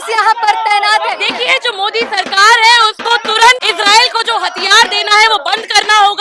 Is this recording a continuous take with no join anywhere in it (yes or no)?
no